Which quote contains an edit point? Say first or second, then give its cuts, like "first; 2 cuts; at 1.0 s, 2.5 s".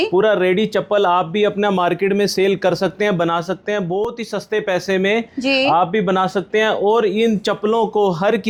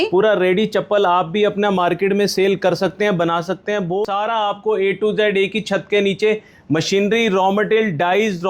second; 1 cut; at 4.1 s